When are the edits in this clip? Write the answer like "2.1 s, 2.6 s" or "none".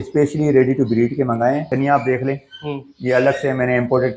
1.7 s